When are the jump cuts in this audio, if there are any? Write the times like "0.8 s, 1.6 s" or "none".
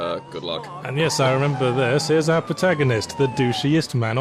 3.1 s